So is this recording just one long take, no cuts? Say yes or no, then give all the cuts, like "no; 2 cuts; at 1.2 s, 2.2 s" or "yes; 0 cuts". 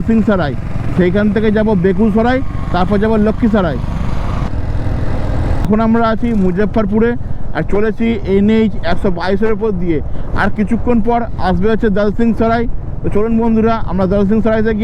yes; 0 cuts